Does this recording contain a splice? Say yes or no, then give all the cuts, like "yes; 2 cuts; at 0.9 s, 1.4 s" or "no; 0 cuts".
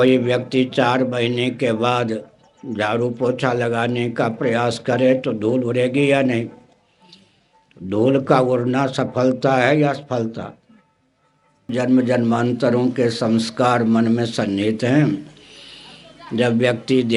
yes; 1 cut; at 11.7 s